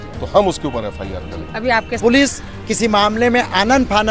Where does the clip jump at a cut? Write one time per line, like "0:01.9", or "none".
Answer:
0:02.0